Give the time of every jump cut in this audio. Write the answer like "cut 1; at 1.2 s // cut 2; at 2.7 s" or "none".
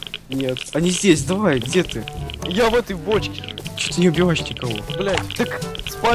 cut 1; at 3.9 s // cut 2; at 5.4 s